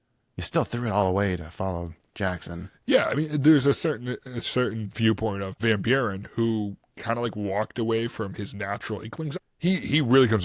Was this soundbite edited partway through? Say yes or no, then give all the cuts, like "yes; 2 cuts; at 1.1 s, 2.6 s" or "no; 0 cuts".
yes; 2 cuts; at 5.6 s, 9.4 s